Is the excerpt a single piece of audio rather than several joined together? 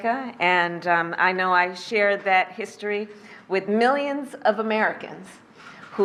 yes; 0 cuts

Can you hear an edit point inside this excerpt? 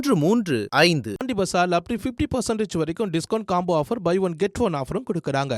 yes; 1 cut; at 1.1 s

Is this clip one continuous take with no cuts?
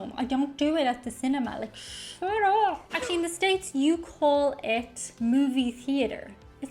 no; 1 cut; at 2.9 s

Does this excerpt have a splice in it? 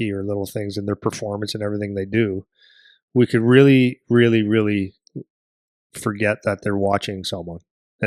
no; 0 cuts

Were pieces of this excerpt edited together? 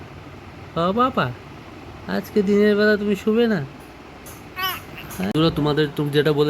yes; 1 cut; at 5.3 s

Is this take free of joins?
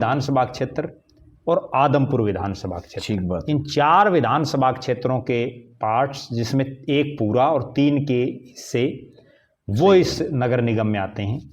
yes; 0 cuts

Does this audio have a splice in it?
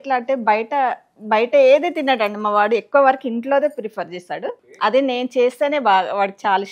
yes; 1 cut; at 4.6 s

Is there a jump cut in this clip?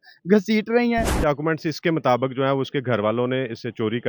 yes; 1 cut; at 1.2 s

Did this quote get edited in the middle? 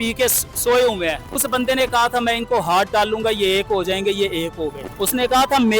yes; 2 cuts; at 1.3 s, 4.8 s

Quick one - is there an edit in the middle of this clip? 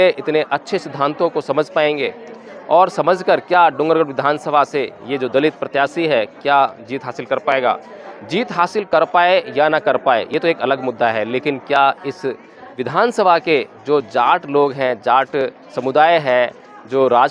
yes; 1 cut; at 12.7 s

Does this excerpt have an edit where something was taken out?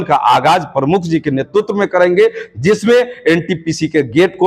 no; 0 cuts

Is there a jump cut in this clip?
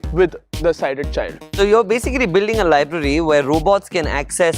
yes; 1 cut; at 1.5 s

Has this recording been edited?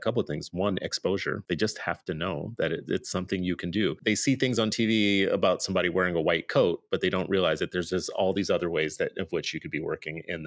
yes; 2 cuts; at 1.4 s, 4.0 s

